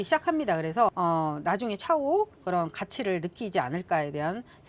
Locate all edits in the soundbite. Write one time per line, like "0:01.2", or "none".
0:00.9